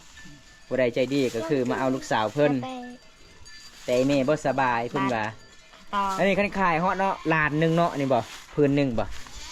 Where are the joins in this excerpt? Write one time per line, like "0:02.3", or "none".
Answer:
none